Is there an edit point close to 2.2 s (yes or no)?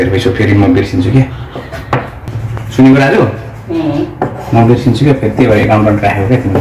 no